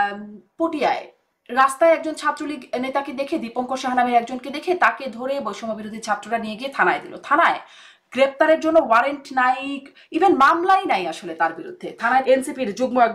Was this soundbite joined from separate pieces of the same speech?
yes; 1 cut; at 12.2 s

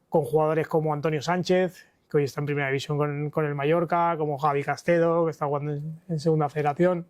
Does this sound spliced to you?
no; 0 cuts

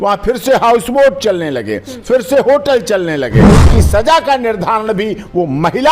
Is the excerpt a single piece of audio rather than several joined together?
no; 1 cut; at 3.5 s

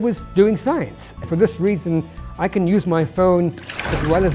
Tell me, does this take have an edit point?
yes; 1 cut; at 1.3 s

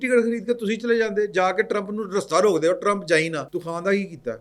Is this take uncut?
no; 1 cut; at 3.5 s

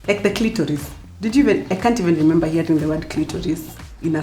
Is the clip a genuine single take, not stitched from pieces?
yes; 0 cuts

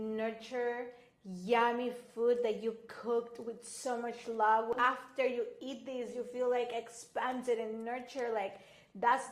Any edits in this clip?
yes; 1 cut; at 4.7 s

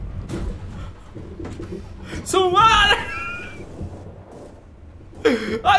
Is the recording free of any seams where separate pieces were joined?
yes; 0 cuts

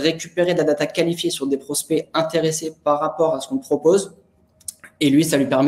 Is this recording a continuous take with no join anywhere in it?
yes; 0 cuts

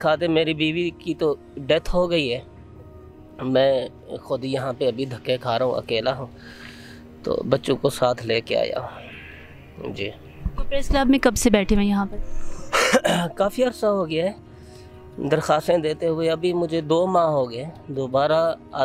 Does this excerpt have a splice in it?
no; 0 cuts

